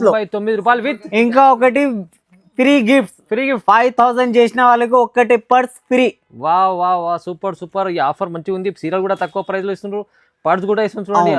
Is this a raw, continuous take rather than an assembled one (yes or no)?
yes